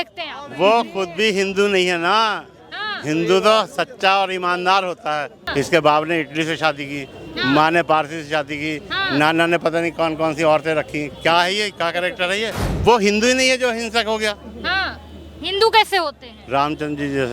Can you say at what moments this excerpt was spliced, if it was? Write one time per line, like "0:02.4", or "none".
0:05.4
0:12.6